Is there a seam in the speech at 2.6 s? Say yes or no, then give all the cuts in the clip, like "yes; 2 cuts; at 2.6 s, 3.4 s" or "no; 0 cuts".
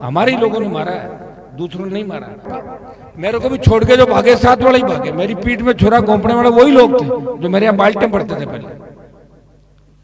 yes; 1 cut; at 2.6 s